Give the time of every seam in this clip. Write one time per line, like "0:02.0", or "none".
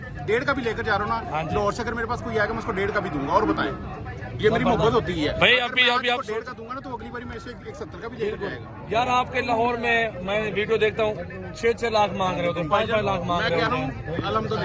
none